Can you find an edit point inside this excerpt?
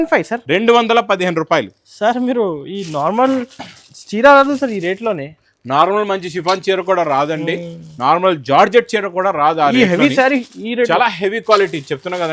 no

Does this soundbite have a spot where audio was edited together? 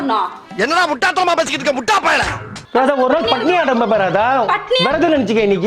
yes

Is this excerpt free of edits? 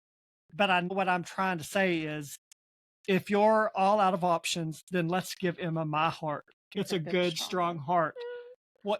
no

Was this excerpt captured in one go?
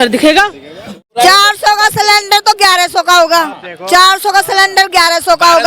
no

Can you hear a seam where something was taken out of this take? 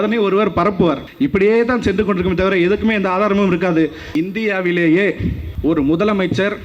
yes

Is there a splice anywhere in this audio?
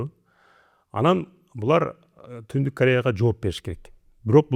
no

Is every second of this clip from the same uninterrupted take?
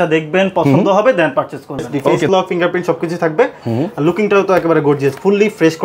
no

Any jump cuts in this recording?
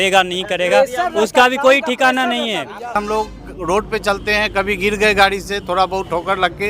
yes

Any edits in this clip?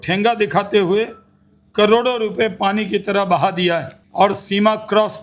yes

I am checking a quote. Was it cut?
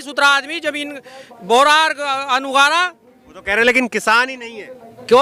no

